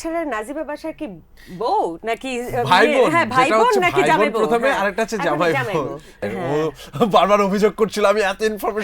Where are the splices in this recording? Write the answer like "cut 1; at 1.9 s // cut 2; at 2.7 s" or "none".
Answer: cut 1; at 6.2 s